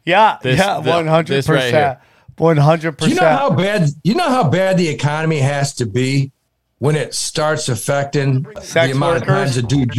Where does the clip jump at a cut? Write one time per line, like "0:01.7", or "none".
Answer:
0:08.6